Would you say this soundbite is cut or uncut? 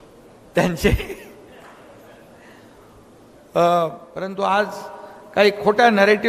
cut